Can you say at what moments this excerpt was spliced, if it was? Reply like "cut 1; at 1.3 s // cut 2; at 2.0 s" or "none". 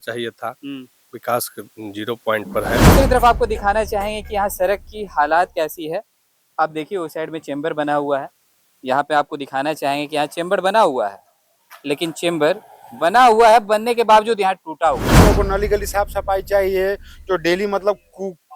cut 1; at 2.9 s // cut 2; at 15.2 s